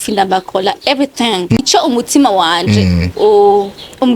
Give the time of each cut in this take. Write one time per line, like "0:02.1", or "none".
0:01.6